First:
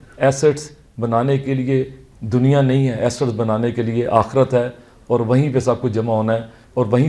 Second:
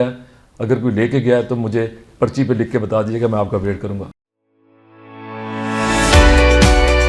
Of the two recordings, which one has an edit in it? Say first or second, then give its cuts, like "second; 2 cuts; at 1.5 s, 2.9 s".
second; 1 cut; at 4.2 s